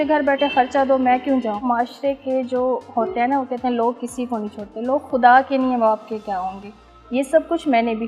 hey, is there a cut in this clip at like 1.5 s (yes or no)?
no